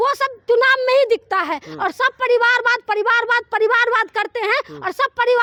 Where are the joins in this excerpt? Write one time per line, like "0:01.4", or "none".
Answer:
none